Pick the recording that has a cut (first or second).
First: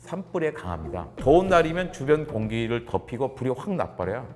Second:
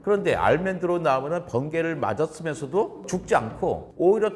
first